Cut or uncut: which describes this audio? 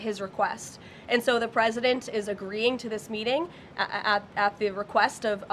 uncut